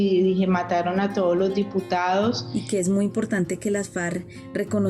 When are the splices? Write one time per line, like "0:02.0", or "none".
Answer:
0:02.4